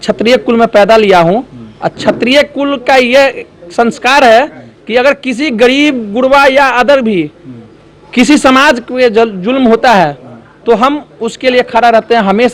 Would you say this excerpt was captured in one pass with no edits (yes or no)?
yes